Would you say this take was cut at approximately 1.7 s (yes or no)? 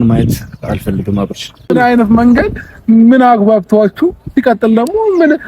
yes